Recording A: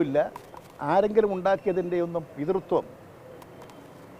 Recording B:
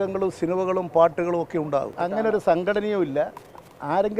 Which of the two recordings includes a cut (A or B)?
B